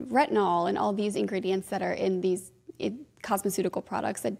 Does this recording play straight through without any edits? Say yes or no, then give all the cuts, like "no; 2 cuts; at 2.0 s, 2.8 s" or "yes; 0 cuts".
yes; 0 cuts